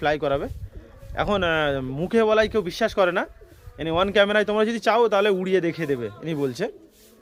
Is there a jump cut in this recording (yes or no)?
no